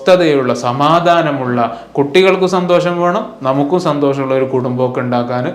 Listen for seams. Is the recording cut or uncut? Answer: uncut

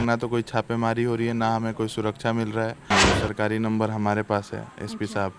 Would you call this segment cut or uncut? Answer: cut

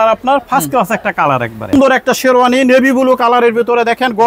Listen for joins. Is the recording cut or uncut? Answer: cut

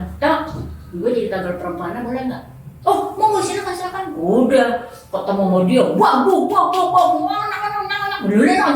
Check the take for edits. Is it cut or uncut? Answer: uncut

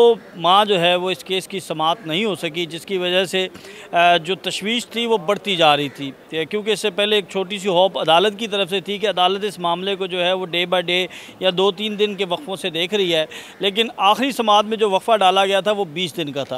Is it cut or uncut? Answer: uncut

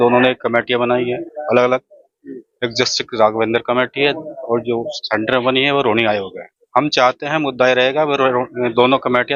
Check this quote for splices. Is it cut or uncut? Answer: uncut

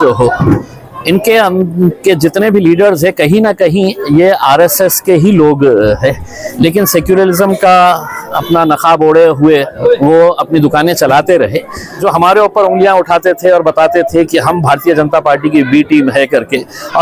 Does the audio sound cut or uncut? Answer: cut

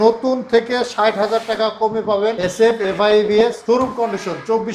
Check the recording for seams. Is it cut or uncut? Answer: cut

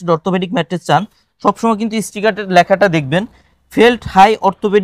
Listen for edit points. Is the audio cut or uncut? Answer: uncut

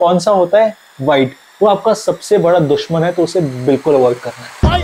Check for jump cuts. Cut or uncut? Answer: uncut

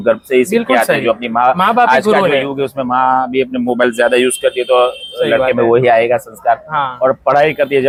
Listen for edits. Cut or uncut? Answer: uncut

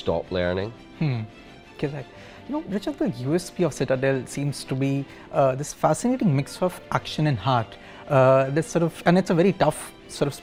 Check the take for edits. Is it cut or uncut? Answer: uncut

